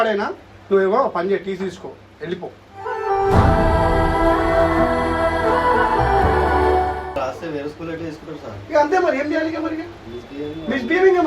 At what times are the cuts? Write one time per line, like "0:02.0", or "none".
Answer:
0:07.2